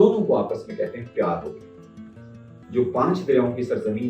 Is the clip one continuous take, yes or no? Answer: no